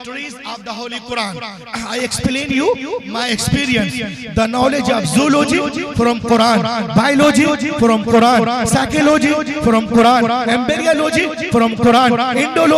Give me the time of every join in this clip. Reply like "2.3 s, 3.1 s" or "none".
none